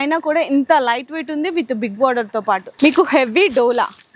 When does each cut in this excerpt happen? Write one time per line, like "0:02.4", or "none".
0:02.7